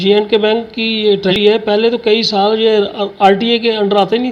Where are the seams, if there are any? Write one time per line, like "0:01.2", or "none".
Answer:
0:01.3

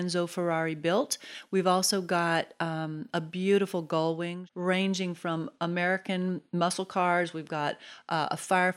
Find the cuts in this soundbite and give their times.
0:01.3
0:04.4

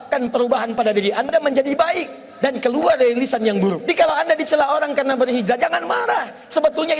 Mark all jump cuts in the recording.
0:03.8

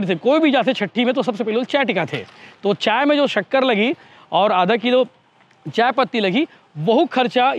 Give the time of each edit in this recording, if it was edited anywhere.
none

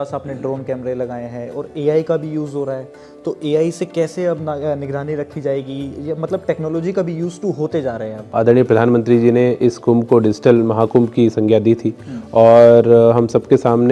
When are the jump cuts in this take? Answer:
0:08.3

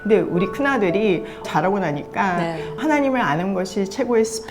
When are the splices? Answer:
0:01.5
0:02.8

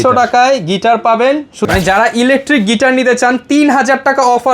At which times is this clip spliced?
0:01.6

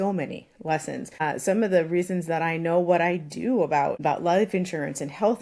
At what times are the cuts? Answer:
0:01.2
0:04.0

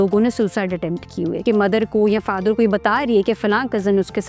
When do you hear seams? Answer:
0:01.4

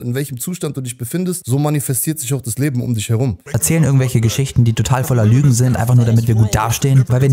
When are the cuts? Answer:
0:01.4
0:03.5

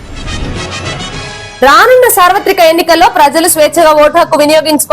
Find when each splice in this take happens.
0:01.5

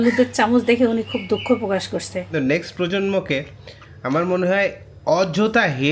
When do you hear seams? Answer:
0:02.3

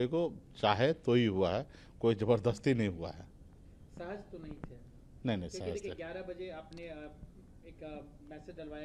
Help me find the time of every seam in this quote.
none

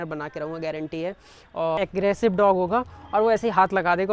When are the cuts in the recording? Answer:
0:01.8

